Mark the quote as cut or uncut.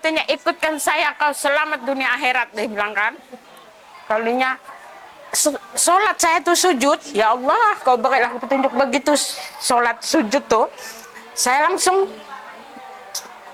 uncut